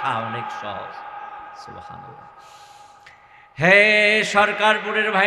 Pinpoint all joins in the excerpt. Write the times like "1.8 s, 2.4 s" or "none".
none